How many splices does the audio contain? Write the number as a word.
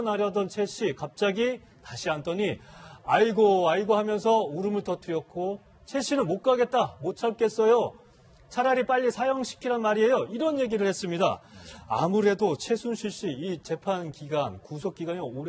zero